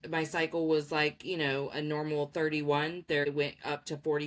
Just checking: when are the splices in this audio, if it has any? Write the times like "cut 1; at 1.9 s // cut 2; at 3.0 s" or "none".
cut 1; at 3.3 s

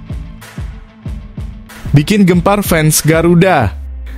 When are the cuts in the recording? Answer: cut 1; at 1.9 s

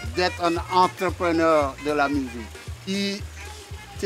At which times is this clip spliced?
cut 1; at 2.7 s

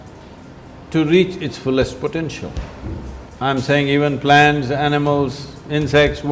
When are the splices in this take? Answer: cut 1; at 3.2 s

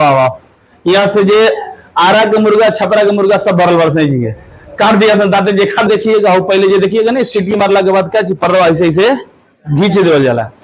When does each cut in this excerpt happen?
cut 1; at 5.9 s

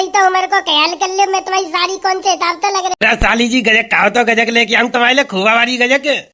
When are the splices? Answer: cut 1; at 2.9 s

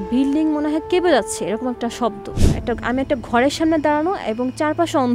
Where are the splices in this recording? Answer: cut 1; at 2.3 s

